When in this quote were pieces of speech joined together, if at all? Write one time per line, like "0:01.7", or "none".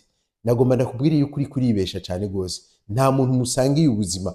none